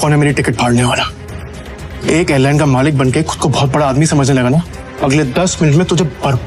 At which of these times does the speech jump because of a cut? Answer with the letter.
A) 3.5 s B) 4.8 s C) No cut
B